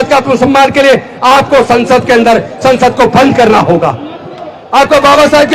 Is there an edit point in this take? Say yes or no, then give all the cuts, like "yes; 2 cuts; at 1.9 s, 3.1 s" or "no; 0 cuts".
no; 0 cuts